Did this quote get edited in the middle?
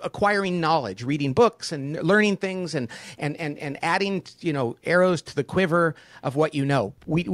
no; 0 cuts

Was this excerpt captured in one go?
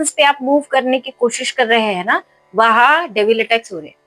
yes; 0 cuts

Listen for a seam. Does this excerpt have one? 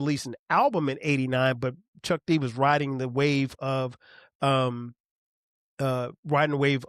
no; 0 cuts

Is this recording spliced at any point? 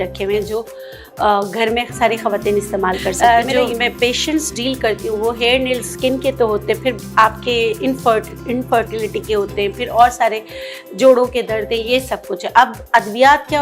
yes; 1 cut; at 3.2 s

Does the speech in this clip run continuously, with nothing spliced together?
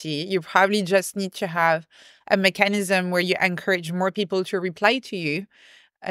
yes; 0 cuts

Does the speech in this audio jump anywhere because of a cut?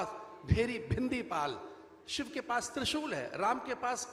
no; 0 cuts

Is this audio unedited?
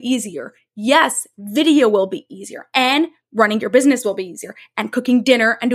yes; 0 cuts

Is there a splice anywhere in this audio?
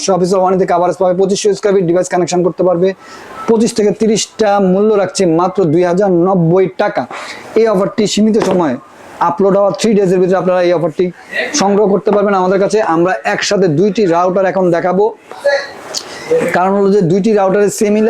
no; 0 cuts

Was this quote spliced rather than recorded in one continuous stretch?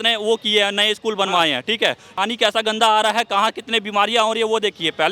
yes; 1 cut; at 2.1 s

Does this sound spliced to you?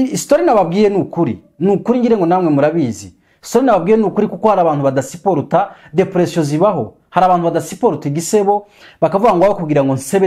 no; 0 cuts

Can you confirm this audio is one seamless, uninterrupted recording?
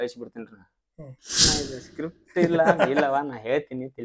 no; 1 cut; at 1.5 s

